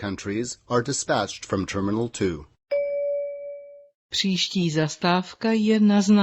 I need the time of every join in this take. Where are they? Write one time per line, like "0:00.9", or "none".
0:02.6